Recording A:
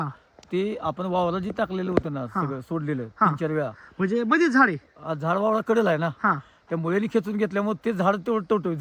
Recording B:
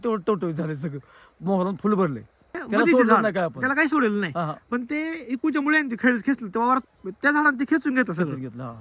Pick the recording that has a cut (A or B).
B